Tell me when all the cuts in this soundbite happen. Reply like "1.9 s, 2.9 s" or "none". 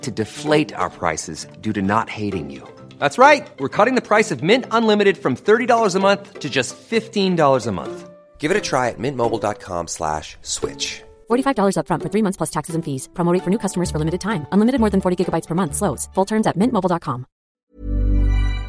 17.6 s